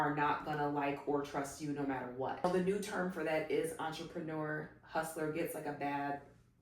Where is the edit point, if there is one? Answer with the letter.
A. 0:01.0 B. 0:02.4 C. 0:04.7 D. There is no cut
B